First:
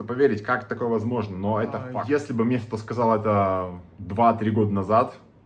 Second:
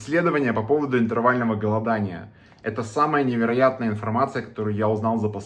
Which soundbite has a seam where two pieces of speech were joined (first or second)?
first